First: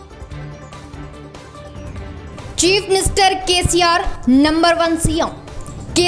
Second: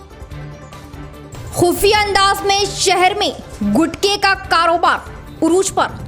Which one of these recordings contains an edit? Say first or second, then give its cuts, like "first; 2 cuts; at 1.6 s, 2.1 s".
first; 1 cut; at 1.2 s